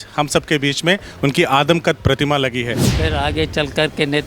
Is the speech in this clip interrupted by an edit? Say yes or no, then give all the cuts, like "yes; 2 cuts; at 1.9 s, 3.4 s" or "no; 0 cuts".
yes; 1 cut; at 2.8 s